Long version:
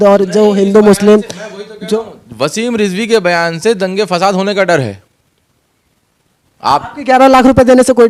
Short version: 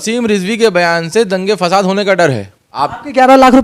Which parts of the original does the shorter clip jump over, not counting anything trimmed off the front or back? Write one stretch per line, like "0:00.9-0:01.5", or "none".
0:05.1-0:06.5

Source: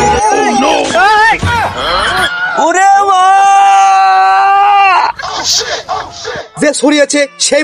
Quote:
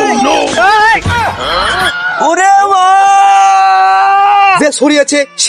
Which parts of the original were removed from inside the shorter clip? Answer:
0:04.9-0:06.6

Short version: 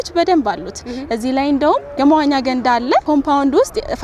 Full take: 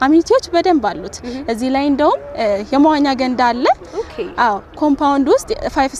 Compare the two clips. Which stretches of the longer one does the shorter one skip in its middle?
0:02.3-0:02.6
0:03.8-0:04.8

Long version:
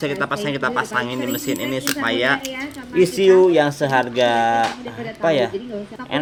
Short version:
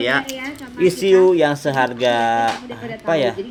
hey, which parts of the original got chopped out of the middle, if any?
none

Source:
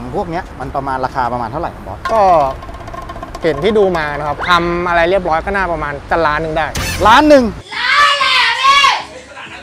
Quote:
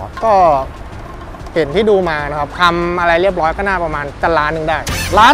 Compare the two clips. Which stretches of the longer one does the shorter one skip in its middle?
none

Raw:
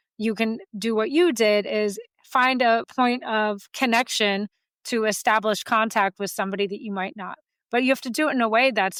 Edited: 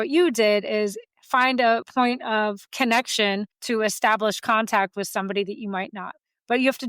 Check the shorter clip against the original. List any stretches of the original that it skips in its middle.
0:04.5-0:04.8

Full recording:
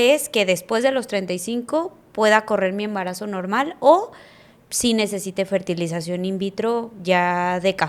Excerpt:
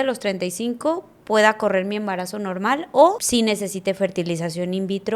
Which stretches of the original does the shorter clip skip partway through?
0:04.1-0:04.7

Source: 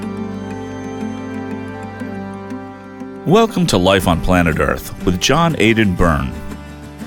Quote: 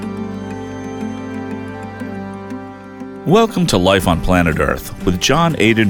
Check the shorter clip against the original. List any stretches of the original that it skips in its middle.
none

